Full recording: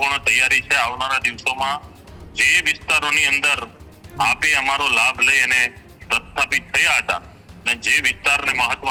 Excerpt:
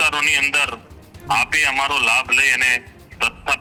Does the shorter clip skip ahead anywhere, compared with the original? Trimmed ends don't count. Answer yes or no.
no